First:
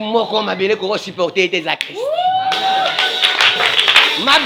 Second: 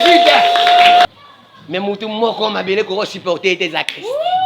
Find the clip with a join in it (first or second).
second